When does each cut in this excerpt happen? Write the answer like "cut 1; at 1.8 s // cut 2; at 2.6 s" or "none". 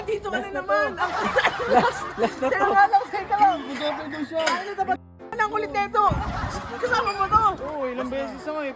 cut 1; at 5.2 s